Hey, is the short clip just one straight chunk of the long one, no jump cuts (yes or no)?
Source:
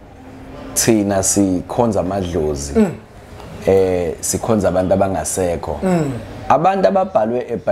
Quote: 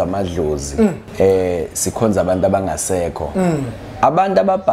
no